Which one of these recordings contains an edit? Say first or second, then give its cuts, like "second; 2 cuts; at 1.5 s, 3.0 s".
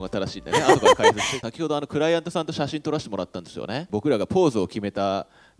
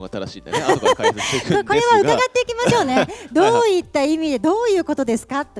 first; 2 cuts; at 1.3 s, 3.9 s